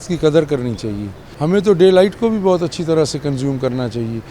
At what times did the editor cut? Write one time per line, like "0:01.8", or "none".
0:01.3